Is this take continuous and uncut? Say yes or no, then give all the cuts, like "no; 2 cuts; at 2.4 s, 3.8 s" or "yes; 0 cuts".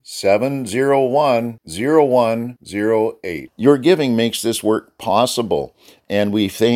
yes; 0 cuts